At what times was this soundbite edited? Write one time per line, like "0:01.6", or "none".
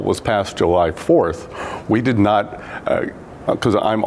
none